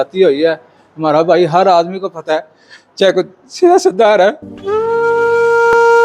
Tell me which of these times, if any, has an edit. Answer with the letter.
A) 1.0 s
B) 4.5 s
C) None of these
B